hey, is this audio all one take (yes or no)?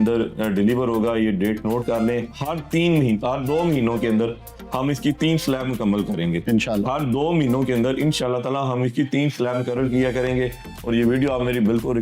yes